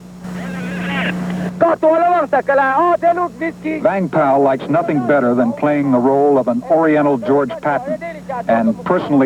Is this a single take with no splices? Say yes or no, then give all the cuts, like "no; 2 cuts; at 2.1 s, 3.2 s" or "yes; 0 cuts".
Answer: yes; 0 cuts